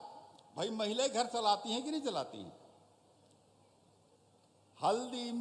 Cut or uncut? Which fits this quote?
uncut